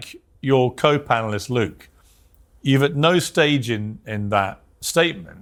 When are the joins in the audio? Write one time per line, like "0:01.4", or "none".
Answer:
none